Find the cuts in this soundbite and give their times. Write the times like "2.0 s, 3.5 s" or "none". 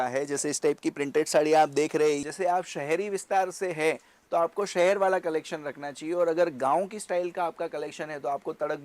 2.2 s